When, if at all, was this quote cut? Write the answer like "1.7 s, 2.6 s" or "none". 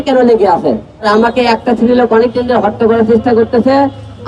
1.1 s